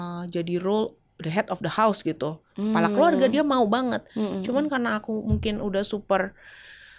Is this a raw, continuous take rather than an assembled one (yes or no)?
yes